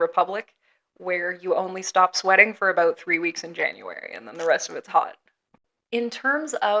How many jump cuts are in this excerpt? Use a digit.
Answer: 1